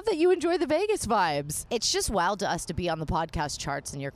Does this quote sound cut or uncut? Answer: cut